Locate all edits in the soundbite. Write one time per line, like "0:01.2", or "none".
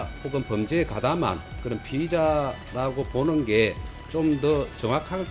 none